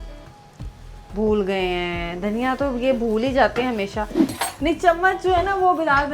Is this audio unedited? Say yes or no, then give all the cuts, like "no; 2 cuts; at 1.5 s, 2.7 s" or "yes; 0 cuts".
no; 1 cut; at 4.3 s